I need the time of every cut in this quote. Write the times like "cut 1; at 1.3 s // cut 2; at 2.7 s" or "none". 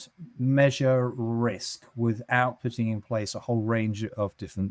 none